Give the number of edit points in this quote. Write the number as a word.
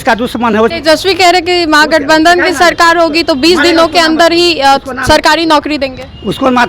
zero